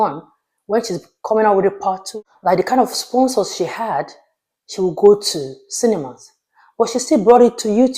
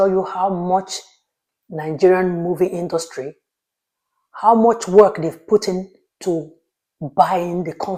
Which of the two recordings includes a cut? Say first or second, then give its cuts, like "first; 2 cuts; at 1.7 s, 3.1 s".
first; 1 cut; at 2.0 s